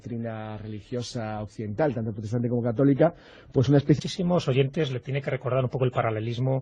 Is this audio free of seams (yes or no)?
yes